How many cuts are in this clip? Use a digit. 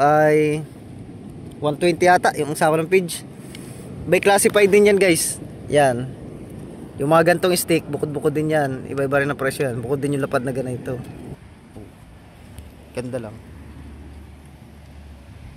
1